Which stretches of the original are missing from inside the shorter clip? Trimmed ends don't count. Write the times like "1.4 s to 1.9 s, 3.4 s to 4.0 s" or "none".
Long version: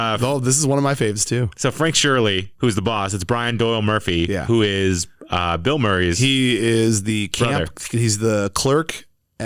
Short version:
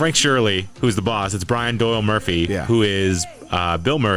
none